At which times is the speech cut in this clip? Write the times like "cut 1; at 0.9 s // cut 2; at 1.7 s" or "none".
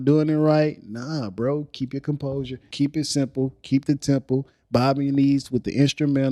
cut 1; at 2.7 s